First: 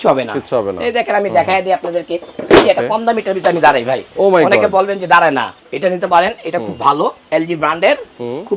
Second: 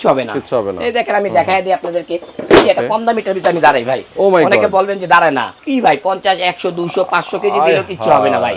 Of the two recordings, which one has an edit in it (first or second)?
first